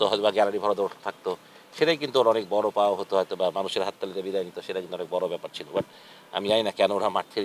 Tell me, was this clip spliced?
no; 0 cuts

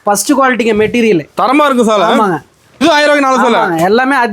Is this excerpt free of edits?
no; 1 cut; at 2.8 s

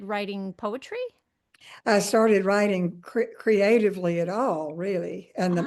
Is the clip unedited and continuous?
yes; 0 cuts

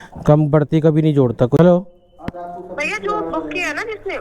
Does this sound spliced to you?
yes; 1 cut; at 1.6 s

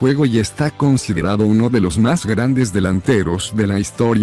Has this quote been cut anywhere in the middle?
yes; 1 cut; at 2.8 s

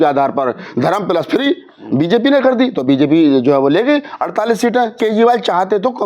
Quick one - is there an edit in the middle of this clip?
yes; 1 cut; at 5.0 s

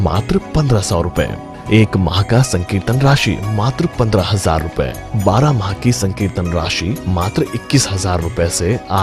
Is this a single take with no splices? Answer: yes; 0 cuts

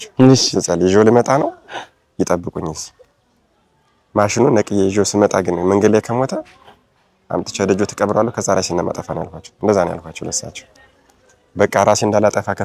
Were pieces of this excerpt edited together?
no; 0 cuts

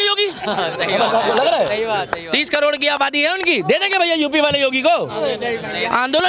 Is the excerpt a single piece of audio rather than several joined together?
yes; 0 cuts

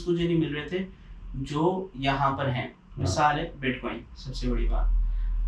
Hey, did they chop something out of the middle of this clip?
no; 0 cuts

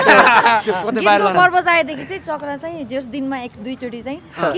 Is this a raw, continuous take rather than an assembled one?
yes; 0 cuts

